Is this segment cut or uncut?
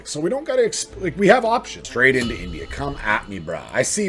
cut